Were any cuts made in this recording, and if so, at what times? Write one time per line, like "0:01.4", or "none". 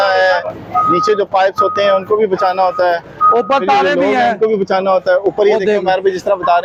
none